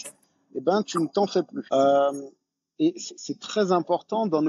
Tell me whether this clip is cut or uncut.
cut